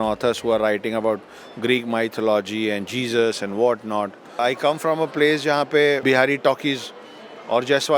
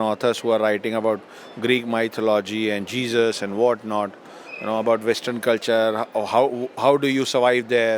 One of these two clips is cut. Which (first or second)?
first